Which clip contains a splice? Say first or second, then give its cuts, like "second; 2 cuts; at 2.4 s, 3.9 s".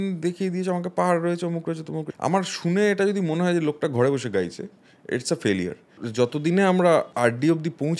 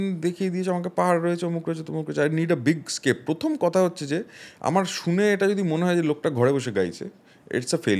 first; 3 cuts; at 2.0 s, 6.0 s, 7.1 s